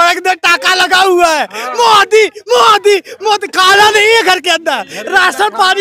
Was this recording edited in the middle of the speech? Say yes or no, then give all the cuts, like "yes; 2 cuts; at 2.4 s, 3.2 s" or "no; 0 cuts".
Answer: no; 0 cuts